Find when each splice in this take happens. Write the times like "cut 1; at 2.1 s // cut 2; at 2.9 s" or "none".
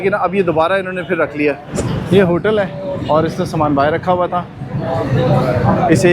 cut 1; at 1.7 s